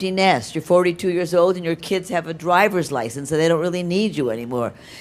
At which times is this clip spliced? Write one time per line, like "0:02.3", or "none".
none